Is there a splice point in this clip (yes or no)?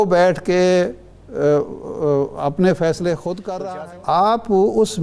yes